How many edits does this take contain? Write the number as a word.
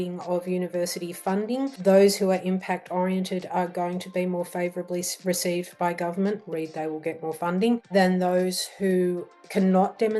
two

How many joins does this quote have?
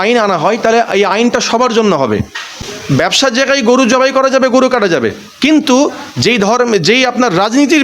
one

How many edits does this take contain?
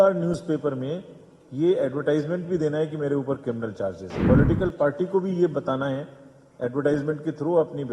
one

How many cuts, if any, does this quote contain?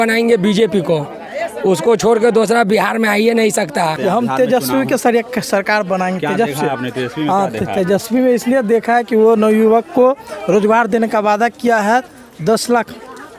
one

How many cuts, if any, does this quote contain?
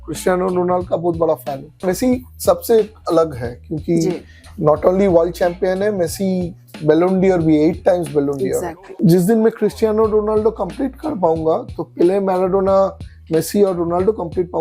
two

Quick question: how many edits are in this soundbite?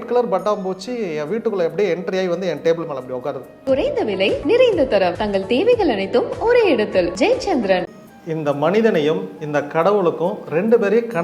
two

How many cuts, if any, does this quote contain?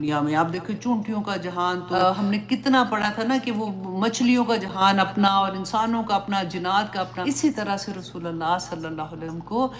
two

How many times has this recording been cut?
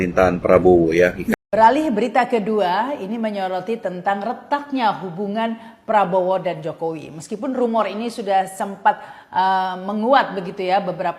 one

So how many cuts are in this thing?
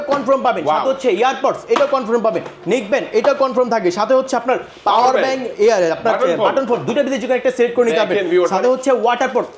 zero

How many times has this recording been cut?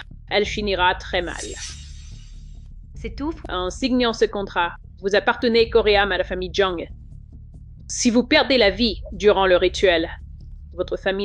zero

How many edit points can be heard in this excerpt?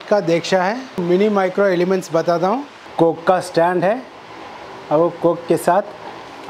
two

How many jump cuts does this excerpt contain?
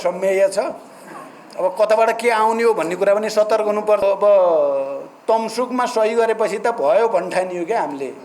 one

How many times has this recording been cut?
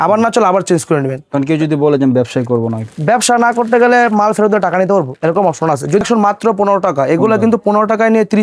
one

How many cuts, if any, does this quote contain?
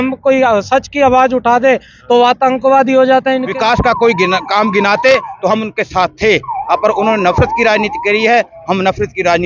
one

